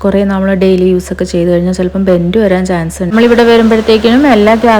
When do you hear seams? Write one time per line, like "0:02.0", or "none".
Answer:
0:03.1